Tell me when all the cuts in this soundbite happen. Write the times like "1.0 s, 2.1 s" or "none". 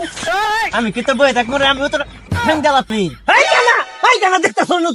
2.9 s